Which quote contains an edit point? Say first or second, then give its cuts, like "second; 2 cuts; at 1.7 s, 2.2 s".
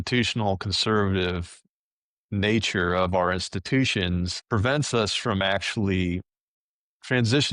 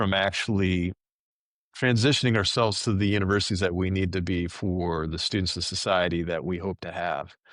first; 1 cut; at 4.4 s